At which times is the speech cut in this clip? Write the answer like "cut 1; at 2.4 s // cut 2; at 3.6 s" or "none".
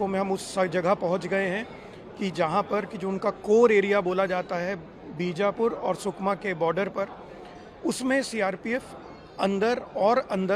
none